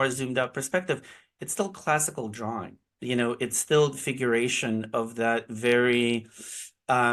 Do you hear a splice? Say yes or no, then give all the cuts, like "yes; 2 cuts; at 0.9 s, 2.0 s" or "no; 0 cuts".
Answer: no; 0 cuts